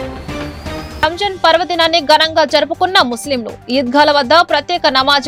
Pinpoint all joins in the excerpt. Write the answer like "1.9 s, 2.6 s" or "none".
none